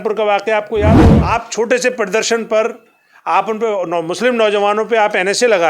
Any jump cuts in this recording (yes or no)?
yes